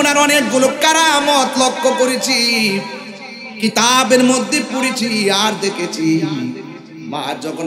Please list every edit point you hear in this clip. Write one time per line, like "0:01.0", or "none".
none